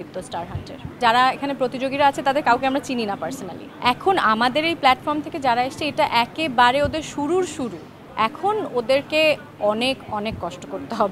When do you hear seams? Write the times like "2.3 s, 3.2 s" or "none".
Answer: 1.0 s, 3.5 s, 8.0 s

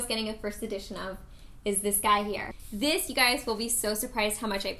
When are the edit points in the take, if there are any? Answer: 2.5 s

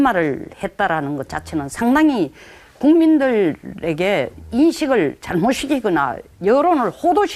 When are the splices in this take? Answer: 4.8 s

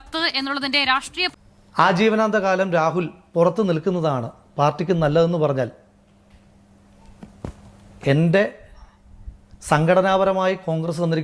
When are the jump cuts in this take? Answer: 1.2 s

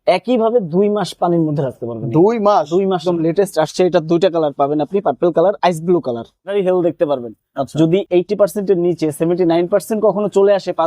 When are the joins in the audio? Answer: 3.0 s, 6.5 s

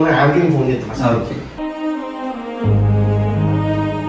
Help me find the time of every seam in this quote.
none

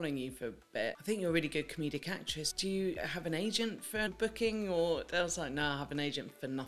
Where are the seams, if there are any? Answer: 1.0 s, 2.9 s, 4.1 s

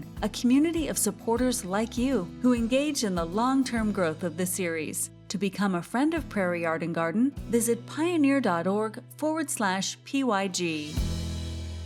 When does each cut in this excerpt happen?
10.9 s

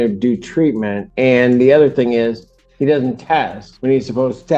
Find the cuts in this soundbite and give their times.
1.0 s, 3.6 s

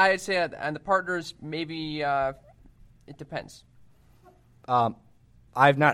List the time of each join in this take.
none

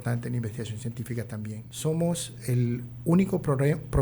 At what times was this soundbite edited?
1.6 s

